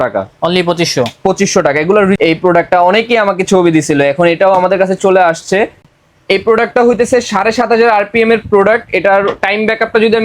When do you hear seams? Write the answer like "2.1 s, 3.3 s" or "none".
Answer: 2.2 s, 5.8 s